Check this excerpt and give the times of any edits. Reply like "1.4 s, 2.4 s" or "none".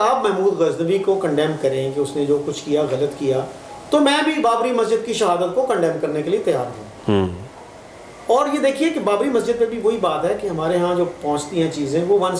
none

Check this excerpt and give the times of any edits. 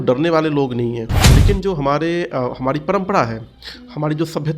1.1 s

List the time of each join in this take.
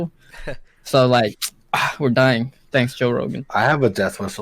3.4 s

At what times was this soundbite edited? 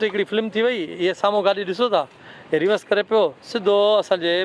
none

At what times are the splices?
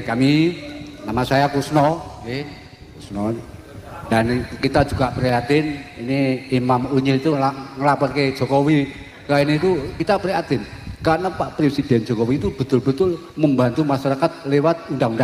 none

